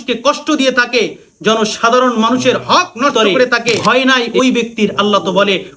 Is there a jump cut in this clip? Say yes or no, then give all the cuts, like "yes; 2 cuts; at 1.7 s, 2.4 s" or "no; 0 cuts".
yes; 1 cut; at 3.8 s